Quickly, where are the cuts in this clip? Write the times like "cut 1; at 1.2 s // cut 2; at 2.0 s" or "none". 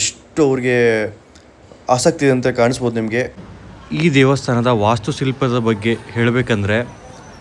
cut 1; at 3.4 s